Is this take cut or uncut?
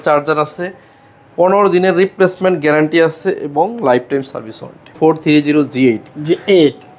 cut